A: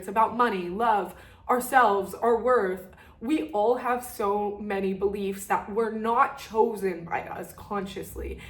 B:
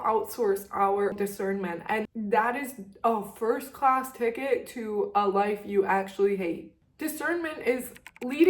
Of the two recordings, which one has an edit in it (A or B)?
B